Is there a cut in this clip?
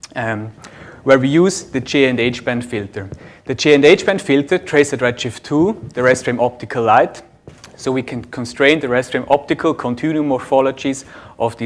no; 0 cuts

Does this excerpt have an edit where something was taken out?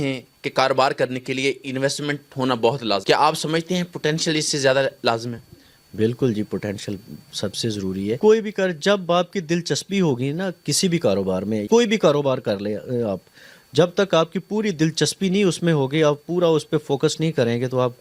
no; 0 cuts

